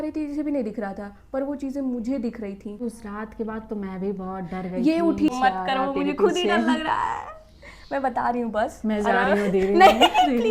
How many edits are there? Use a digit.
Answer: 2